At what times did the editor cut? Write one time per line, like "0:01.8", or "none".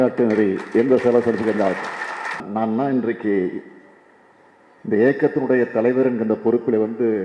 0:02.4